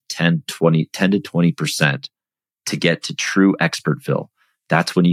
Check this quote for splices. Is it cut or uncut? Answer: uncut